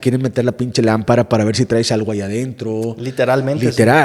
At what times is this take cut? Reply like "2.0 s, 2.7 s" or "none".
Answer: none